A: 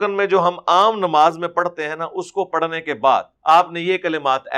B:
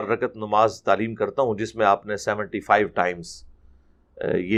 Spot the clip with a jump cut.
A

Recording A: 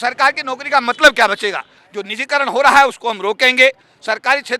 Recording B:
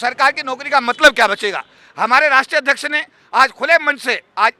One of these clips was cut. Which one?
A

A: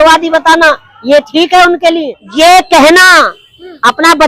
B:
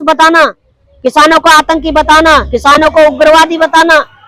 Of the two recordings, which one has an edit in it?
A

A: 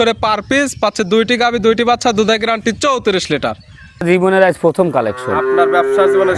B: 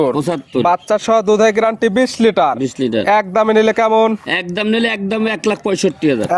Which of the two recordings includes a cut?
A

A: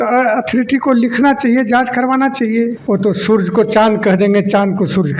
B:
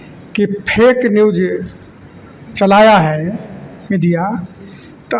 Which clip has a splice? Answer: A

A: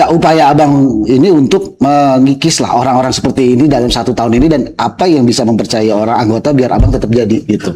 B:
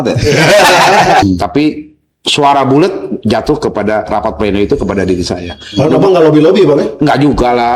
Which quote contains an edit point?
B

